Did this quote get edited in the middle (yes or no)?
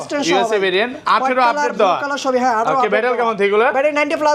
no